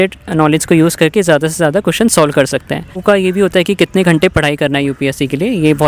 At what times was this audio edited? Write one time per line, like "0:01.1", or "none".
0:03.0